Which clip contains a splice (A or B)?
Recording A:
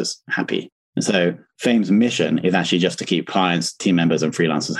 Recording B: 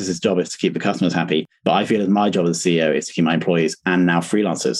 A